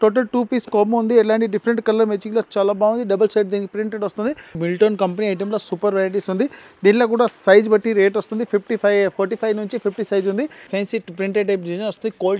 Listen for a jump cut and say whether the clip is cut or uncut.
cut